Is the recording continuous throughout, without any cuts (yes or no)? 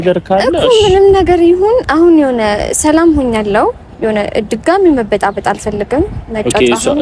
yes